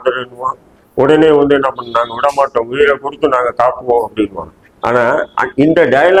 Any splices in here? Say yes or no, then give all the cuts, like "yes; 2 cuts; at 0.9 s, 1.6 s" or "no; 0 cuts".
no; 0 cuts